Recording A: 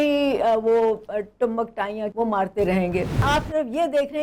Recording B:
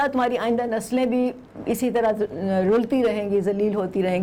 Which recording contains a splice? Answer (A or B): A